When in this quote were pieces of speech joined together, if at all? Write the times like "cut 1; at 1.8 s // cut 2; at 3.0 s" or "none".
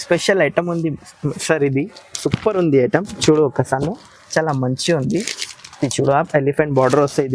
none

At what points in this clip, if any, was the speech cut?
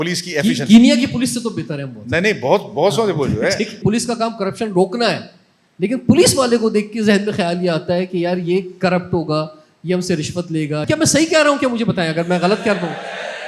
cut 1; at 3.8 s // cut 2; at 10.8 s

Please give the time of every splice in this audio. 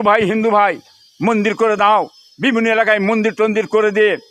cut 1; at 2.2 s

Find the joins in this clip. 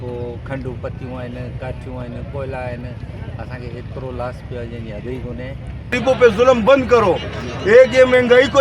cut 1; at 6.0 s

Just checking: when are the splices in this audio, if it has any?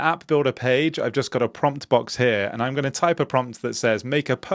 none

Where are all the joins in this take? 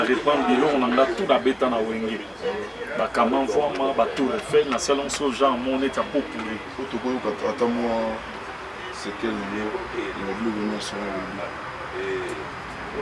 none

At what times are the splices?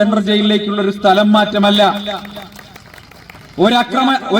none

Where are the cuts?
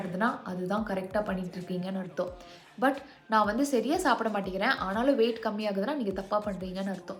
none

